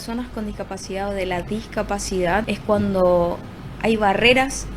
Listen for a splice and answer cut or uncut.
cut